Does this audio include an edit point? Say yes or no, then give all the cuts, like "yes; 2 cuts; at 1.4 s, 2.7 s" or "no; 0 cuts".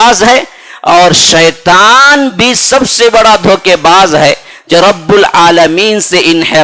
no; 0 cuts